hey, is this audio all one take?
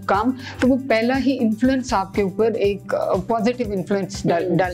yes; 0 cuts

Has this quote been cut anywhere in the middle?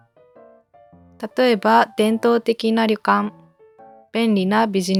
no; 0 cuts

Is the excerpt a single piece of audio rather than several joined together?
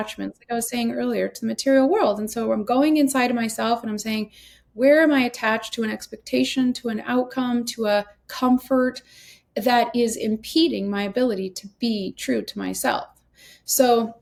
yes; 0 cuts

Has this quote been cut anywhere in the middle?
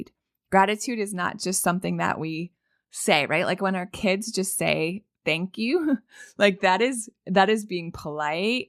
no; 0 cuts

